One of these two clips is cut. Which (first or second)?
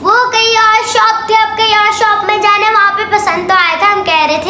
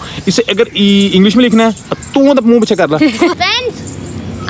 second